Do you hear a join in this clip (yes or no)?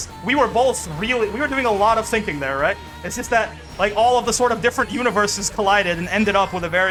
no